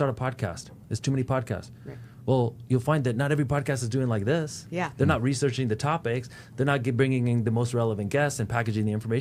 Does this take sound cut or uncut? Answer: uncut